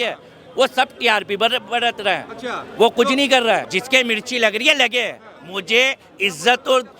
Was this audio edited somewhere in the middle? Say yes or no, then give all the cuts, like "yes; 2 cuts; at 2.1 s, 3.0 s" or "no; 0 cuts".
yes; 1 cut; at 3.7 s